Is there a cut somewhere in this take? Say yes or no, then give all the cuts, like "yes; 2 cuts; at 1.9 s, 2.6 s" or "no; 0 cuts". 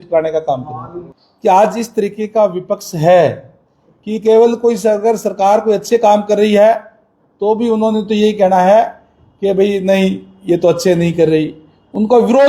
yes; 1 cut; at 0.9 s